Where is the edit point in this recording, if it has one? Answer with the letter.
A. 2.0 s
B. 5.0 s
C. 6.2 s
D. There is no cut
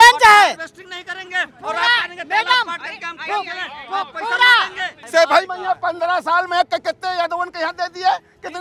B